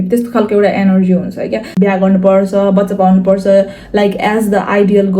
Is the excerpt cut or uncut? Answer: cut